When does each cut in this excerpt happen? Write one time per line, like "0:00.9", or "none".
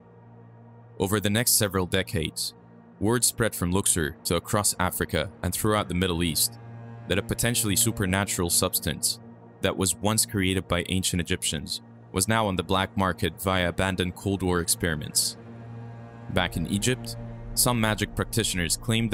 0:01.0